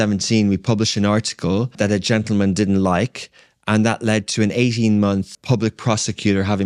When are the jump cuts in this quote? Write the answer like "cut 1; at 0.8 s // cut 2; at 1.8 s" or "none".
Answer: cut 1; at 1.7 s // cut 2; at 5.3 s